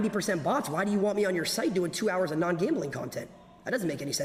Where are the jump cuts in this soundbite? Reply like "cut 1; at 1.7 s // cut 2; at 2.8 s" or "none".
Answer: none